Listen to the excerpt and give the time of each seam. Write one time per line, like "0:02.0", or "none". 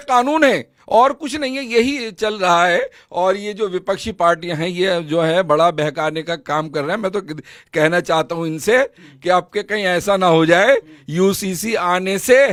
none